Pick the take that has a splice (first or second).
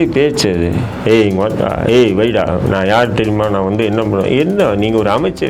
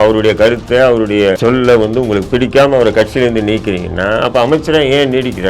second